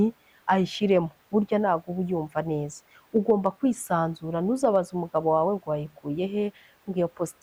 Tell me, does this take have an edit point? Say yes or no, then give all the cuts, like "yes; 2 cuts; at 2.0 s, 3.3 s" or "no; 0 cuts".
no; 0 cuts